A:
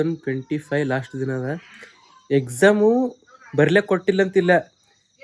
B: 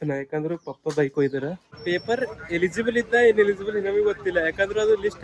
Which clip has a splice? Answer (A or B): B